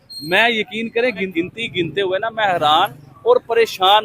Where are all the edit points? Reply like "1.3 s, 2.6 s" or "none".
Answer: 1.3 s